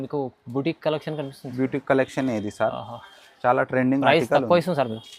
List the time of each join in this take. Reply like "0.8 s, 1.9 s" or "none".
none